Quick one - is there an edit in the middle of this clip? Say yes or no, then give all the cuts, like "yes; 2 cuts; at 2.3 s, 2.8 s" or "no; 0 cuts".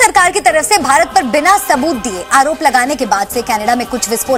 no; 0 cuts